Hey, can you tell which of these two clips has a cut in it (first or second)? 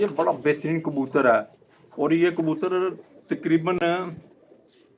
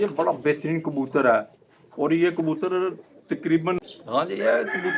second